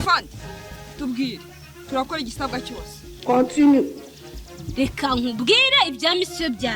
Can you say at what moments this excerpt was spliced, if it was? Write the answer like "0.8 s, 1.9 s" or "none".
none